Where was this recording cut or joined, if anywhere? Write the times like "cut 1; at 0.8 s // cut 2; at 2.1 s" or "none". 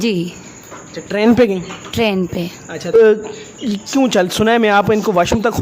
cut 1; at 2.9 s